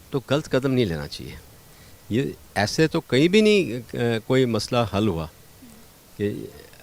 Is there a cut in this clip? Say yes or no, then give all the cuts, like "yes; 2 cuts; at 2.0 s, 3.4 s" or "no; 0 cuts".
no; 0 cuts